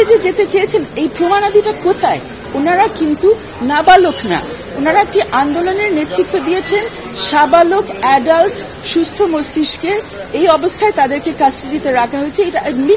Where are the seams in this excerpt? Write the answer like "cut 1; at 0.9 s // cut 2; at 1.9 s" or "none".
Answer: cut 1; at 2.4 s